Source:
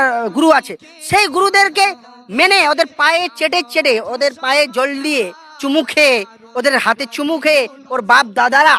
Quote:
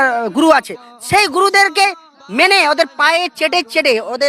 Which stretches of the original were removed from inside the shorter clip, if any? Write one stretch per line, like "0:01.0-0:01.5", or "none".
none